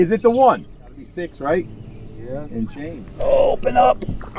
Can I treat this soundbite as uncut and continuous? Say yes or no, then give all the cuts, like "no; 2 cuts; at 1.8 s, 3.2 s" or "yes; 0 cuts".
no; 2 cuts; at 1.1 s, 2.8 s